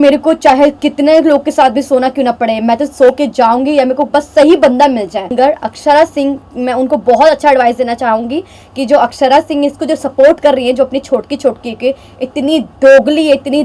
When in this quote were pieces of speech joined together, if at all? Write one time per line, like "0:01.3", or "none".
0:05.3